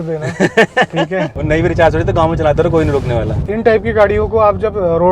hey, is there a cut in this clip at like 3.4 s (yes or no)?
yes